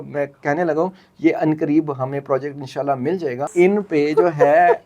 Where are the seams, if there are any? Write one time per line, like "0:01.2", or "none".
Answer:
0:03.5